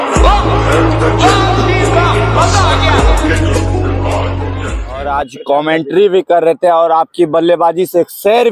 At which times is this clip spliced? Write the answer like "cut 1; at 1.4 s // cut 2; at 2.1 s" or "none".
cut 1; at 5.1 s